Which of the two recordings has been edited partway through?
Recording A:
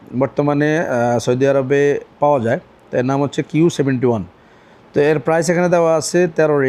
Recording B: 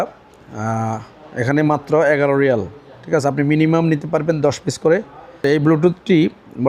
B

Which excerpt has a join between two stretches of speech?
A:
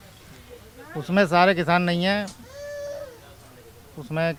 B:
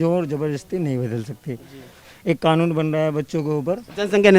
B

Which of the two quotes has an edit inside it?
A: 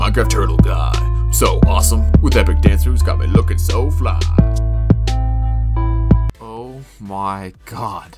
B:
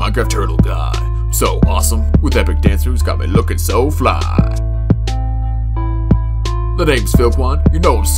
A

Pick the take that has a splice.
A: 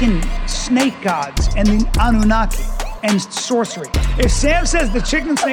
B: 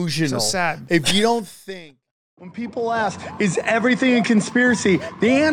B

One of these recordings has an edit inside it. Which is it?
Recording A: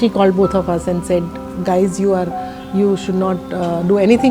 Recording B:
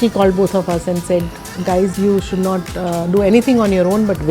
B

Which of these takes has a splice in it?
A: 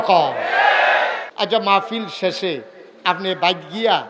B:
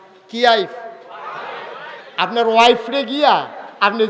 A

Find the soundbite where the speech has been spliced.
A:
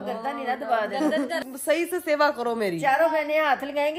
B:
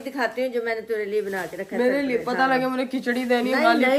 A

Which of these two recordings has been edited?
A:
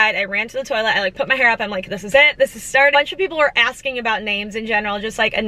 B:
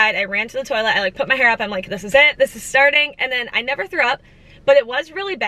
A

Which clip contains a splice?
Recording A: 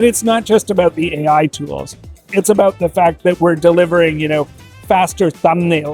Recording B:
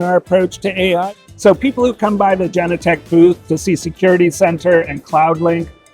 B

